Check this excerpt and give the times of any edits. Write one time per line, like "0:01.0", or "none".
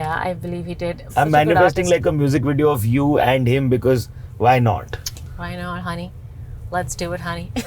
0:01.0